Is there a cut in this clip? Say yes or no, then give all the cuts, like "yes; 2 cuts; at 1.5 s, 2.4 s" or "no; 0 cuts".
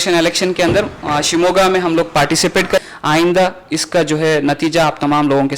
yes; 1 cut; at 2.8 s